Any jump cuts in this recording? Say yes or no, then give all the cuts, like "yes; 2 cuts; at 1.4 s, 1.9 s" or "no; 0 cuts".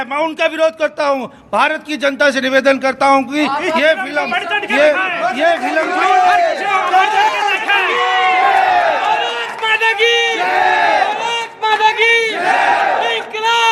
no; 0 cuts